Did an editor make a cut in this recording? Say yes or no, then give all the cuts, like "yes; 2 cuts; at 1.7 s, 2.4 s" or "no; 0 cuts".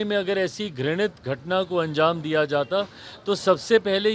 no; 0 cuts